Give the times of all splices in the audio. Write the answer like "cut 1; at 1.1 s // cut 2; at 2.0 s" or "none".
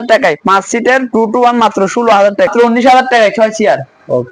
cut 1; at 2.5 s